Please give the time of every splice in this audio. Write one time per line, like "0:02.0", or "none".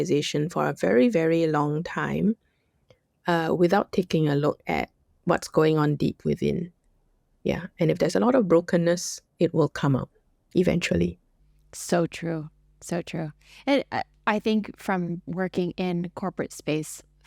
none